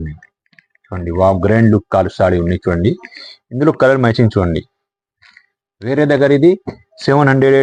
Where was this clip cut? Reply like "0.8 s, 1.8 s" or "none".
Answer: none